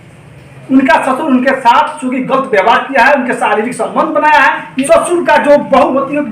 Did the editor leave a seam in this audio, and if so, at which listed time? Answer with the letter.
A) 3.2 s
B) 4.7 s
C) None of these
B